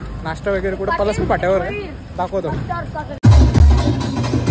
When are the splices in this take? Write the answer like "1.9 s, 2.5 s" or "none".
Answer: 3.1 s